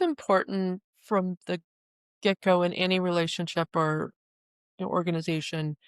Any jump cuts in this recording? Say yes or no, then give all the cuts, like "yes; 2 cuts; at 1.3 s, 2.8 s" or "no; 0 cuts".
yes; 1 cut; at 0.9 s